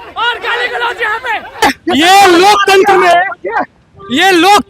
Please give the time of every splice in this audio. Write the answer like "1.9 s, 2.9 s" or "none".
1.6 s